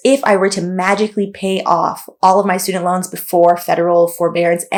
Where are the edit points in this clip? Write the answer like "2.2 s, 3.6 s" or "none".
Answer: none